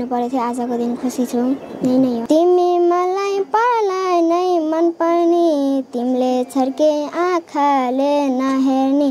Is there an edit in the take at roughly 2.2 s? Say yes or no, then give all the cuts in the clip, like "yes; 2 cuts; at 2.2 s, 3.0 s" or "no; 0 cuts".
yes; 1 cut; at 2.2 s